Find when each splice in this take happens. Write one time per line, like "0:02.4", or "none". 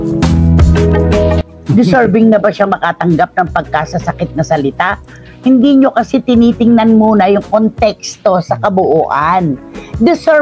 0:01.4